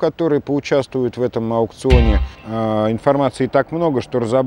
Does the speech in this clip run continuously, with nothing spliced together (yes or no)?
no